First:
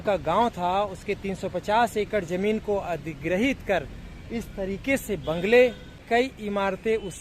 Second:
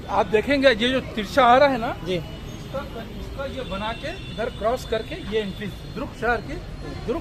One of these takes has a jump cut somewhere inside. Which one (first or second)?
first